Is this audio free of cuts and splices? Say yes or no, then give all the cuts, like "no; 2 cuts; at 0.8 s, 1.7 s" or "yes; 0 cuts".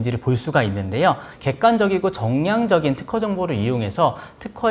no; 1 cut; at 1.3 s